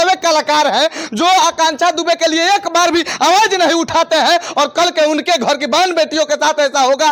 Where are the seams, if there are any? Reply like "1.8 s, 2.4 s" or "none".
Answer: none